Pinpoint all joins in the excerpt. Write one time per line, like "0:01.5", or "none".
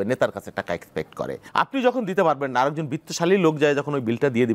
0:01.4